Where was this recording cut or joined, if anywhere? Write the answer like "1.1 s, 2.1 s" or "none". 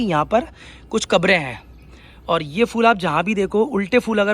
none